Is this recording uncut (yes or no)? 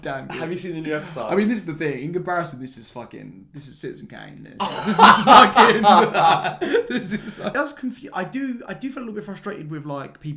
no